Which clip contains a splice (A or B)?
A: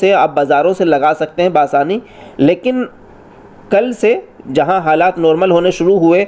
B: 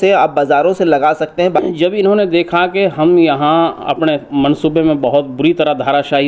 B